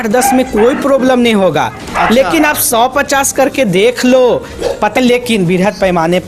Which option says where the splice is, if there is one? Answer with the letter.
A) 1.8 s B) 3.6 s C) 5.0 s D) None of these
C